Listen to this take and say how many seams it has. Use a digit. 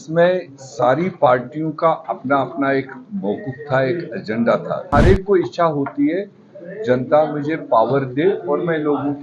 1